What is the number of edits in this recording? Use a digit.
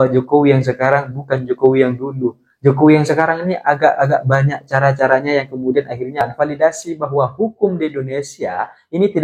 1